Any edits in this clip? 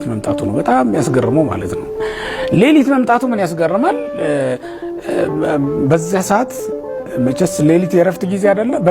no; 0 cuts

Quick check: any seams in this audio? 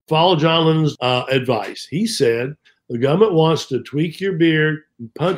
yes; 1 cut; at 0.9 s

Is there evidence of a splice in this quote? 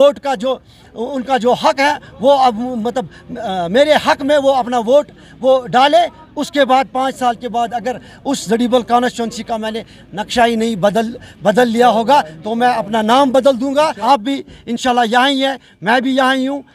yes; 1 cut; at 14.0 s

